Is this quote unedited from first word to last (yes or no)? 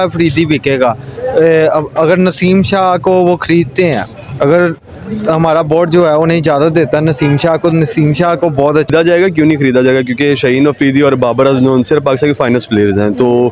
no